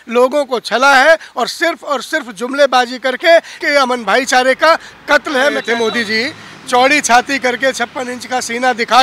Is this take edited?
yes; 2 cuts; at 3.6 s, 5.6 s

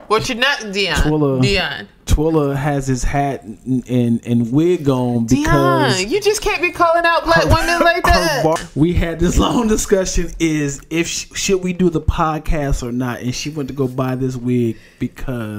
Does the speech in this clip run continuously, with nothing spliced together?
no; 1 cut; at 8.6 s

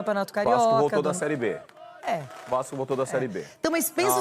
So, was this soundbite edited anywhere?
no; 0 cuts

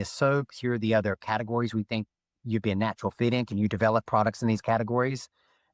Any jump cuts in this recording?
no; 0 cuts

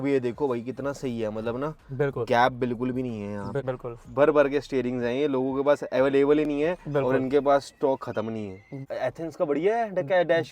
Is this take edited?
yes; 2 cuts; at 3.6 s, 8.7 s

